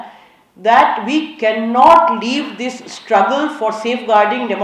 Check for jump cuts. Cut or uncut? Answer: uncut